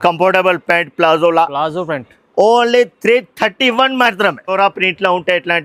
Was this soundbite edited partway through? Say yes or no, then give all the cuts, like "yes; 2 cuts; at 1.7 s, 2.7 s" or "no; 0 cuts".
yes; 1 cut; at 4.5 s